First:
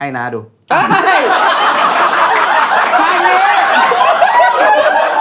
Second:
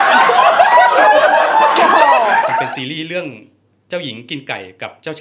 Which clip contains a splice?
second; 1 cut; at 2.6 s

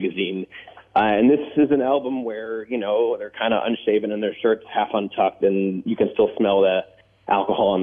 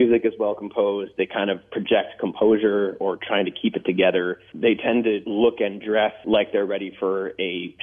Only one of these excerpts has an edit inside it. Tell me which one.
second; 3 cuts; at 4.4 s, 5.2 s, 6.2 s

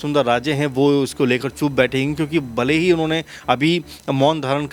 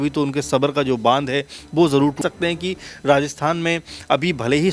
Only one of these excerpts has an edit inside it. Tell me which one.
second; 1 cut; at 2.2 s

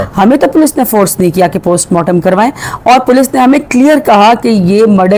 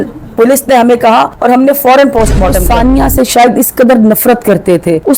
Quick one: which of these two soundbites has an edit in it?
second; 1 cut; at 2.6 s

